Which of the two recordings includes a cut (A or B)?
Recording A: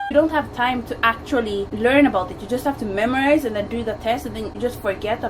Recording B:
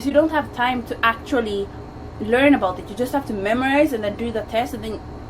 A